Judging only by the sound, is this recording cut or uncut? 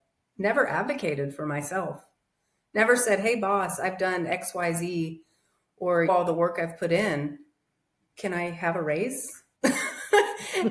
uncut